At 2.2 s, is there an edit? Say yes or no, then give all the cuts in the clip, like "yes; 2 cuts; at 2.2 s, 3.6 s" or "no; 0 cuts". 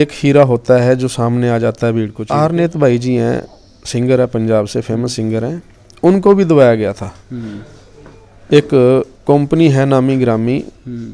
yes; 1 cut; at 2.2 s